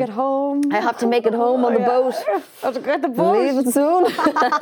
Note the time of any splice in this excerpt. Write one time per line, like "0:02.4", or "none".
none